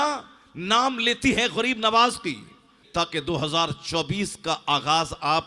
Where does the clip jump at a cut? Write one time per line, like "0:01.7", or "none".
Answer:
0:02.8